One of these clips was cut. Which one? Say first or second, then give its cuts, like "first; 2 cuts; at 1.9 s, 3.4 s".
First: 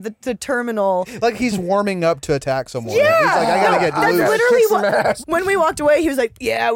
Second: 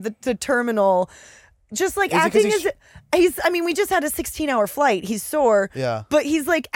first; 2 cuts; at 1.1 s, 5.2 s